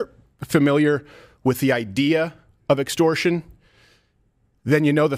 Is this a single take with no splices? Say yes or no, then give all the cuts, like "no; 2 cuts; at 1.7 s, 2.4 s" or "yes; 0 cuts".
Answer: yes; 0 cuts